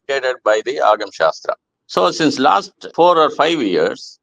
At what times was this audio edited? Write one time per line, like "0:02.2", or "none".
0:01.7
0:02.8